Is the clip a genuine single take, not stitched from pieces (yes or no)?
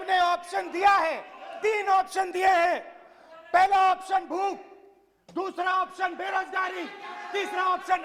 yes